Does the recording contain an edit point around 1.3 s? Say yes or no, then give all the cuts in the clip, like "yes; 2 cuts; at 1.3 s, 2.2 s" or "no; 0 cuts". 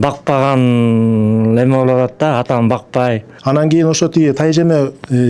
no; 1 cut; at 3.3 s